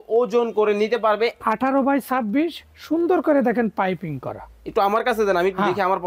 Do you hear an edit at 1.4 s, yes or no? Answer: yes